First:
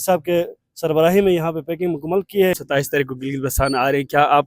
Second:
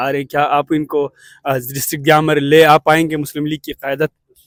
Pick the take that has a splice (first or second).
first